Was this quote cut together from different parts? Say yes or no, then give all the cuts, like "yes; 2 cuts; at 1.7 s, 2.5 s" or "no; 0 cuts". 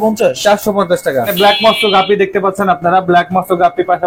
yes; 1 cut; at 1.3 s